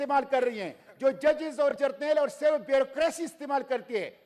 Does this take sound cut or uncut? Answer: uncut